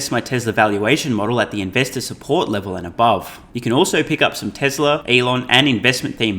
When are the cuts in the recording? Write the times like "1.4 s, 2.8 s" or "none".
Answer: 3.4 s, 5.0 s